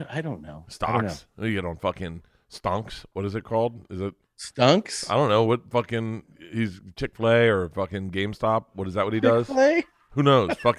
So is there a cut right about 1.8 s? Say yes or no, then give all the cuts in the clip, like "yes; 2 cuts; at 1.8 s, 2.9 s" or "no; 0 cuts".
no; 0 cuts